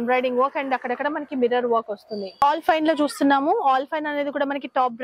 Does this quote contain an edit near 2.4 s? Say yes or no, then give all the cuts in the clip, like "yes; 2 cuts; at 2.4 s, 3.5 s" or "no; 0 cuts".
yes; 1 cut; at 2.4 s